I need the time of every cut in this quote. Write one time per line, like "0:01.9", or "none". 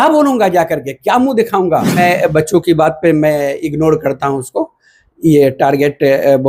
0:01.9